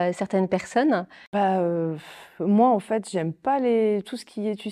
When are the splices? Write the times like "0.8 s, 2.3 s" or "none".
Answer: 1.2 s